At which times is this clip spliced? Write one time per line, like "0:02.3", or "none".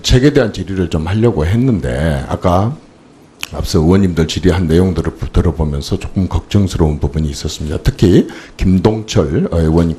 none